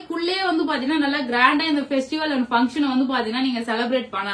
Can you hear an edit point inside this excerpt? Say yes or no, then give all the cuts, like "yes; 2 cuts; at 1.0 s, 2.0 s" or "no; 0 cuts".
no; 0 cuts